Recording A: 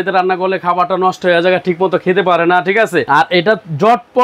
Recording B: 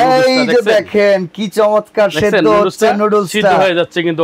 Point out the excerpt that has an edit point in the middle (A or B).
A